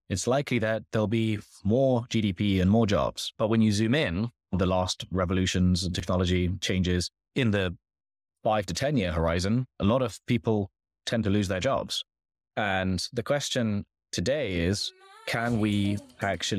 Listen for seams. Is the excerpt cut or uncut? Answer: cut